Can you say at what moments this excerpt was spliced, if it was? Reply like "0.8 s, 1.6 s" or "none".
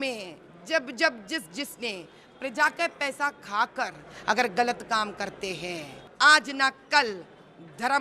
6.0 s